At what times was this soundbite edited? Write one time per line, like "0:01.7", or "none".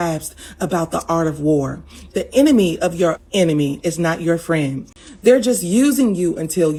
none

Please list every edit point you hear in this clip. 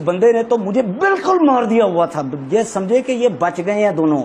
none

